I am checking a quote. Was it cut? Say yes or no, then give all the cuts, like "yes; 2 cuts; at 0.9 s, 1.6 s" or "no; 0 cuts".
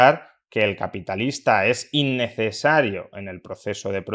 no; 0 cuts